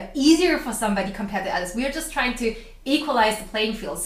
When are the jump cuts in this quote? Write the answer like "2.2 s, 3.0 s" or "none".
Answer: none